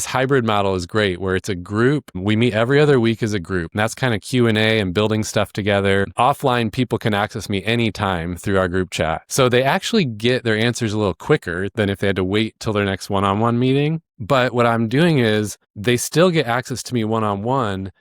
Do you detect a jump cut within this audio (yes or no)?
yes